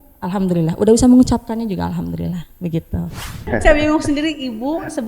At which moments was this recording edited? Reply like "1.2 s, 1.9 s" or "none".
3.4 s